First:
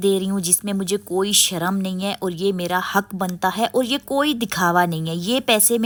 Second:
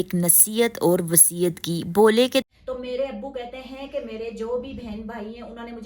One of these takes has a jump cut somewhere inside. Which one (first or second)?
second